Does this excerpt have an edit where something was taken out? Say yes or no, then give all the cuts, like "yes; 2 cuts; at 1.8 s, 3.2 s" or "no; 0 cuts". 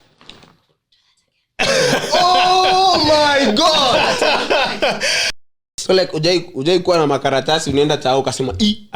yes; 1 cut; at 5.7 s